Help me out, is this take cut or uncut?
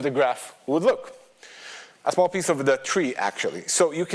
uncut